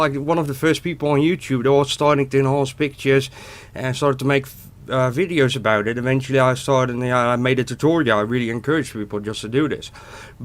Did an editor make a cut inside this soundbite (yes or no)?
yes